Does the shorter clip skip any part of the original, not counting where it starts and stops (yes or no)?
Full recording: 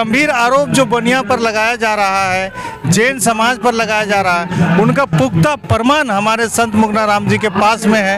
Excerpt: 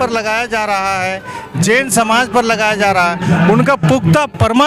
no